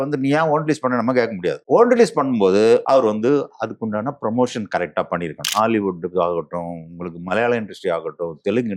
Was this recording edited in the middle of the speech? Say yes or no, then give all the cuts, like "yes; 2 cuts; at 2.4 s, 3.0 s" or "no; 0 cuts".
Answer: yes; 2 cuts; at 1.6 s, 5.5 s